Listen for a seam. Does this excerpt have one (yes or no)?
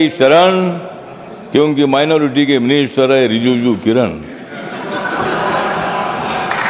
no